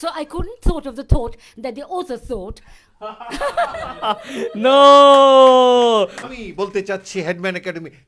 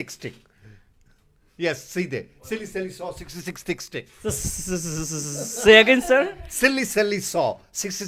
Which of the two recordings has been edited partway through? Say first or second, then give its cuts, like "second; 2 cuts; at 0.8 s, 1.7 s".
first; 1 cut; at 6.2 s